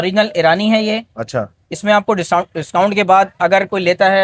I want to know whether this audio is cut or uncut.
uncut